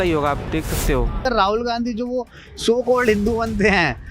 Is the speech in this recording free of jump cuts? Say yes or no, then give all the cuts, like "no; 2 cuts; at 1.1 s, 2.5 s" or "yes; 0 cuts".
no; 1 cut; at 1.2 s